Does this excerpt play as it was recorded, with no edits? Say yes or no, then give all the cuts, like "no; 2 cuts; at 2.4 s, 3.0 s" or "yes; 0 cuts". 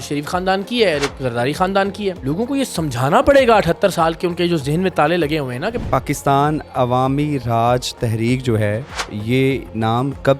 no; 2 cuts; at 2.2 s, 5.8 s